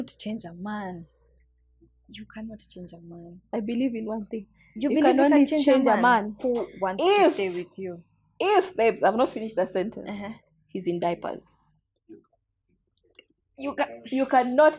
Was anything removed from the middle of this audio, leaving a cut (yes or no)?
no